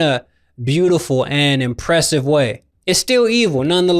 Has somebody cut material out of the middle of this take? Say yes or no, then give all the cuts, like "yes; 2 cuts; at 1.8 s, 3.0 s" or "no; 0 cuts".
yes; 1 cut; at 2.7 s